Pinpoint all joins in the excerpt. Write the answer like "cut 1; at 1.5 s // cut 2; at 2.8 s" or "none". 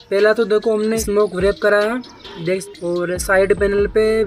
cut 1; at 1.0 s // cut 2; at 2.7 s